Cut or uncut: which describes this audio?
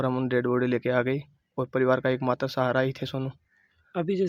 uncut